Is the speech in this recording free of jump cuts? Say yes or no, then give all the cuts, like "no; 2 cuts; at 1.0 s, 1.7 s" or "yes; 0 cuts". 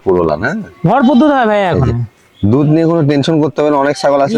yes; 0 cuts